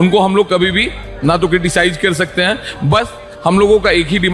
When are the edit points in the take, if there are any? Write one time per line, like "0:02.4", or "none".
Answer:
none